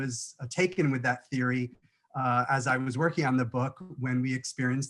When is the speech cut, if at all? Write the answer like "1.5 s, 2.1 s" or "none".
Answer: none